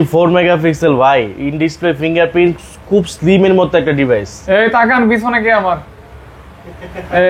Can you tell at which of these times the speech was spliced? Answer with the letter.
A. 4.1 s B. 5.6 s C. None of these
C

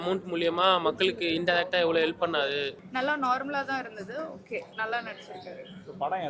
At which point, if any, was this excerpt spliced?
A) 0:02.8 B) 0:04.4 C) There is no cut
A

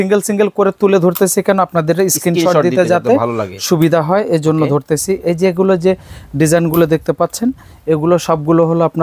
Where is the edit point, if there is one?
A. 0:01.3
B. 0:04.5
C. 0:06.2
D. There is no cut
D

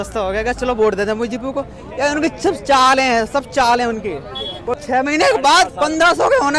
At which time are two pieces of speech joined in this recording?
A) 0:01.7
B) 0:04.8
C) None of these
B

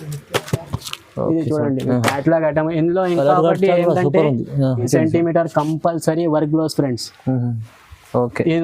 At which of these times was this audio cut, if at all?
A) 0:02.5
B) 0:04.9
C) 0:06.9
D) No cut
B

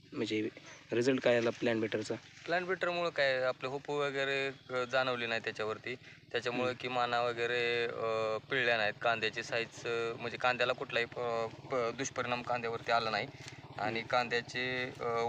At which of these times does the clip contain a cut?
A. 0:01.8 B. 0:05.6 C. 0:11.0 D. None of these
D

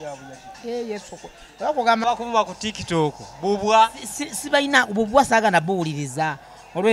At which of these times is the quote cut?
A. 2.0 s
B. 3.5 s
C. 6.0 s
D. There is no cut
A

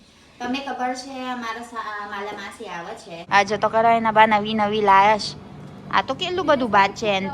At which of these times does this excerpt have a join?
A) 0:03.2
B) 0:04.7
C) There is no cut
A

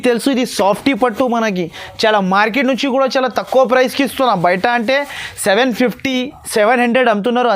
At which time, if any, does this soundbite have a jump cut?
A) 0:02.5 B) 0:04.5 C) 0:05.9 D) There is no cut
D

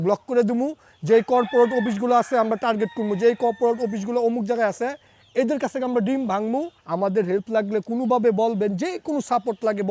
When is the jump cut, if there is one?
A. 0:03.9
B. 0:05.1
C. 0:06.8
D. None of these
C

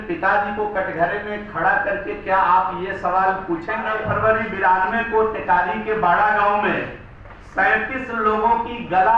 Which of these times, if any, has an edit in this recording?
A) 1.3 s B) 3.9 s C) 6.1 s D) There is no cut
B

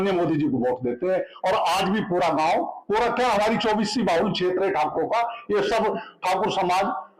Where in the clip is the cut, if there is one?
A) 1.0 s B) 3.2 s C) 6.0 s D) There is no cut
D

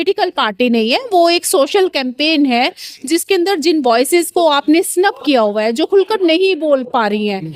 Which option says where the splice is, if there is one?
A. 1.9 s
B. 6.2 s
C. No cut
C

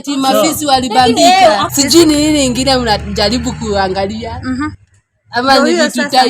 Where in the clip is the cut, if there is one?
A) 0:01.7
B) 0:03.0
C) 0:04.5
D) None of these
A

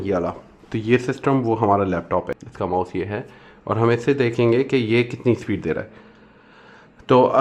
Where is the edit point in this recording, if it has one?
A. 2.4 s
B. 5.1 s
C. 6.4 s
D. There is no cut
A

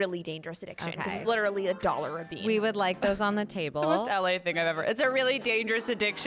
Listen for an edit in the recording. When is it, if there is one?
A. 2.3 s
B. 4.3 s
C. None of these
A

